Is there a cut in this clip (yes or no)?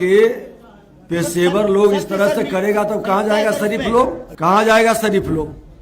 yes